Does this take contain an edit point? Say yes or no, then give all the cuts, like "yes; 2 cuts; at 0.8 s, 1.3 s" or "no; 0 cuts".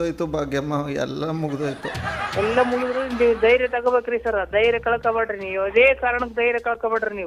no; 0 cuts